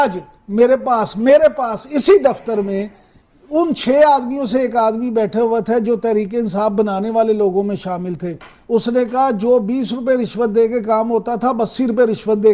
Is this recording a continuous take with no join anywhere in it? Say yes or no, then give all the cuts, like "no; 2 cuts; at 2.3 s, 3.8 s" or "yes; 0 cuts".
yes; 0 cuts